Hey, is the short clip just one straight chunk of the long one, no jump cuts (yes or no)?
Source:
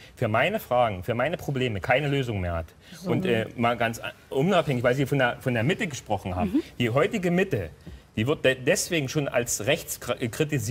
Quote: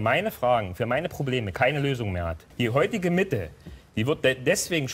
no